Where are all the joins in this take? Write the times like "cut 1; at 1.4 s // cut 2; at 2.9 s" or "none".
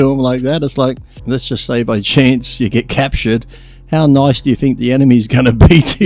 cut 1; at 1.1 s